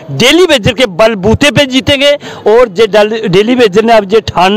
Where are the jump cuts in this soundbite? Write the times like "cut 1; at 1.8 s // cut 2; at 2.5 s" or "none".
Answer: none